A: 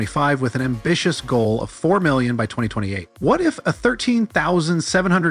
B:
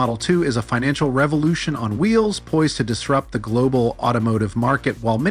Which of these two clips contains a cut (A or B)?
A